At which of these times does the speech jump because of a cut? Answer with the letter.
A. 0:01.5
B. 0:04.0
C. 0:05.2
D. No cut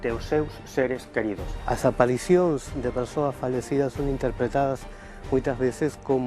A